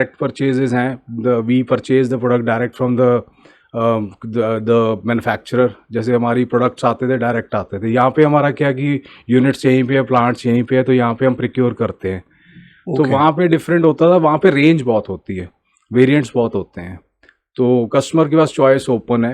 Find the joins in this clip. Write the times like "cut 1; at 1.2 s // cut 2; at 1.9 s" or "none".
none